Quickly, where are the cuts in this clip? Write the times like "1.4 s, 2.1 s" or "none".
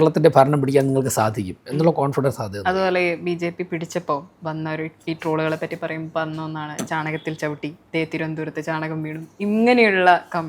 none